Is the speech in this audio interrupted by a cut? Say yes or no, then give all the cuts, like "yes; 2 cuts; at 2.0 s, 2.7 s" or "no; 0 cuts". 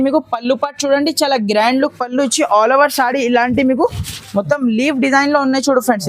no; 0 cuts